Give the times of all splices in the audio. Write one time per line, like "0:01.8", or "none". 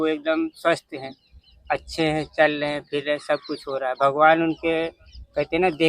none